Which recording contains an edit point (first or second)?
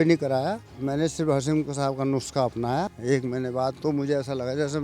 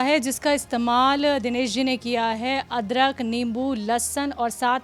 first